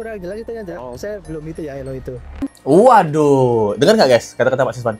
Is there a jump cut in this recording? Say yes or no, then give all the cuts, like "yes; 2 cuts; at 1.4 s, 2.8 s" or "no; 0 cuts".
no; 0 cuts